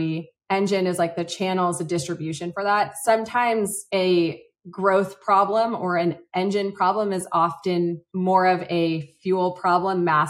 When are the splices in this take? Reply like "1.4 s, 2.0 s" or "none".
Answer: none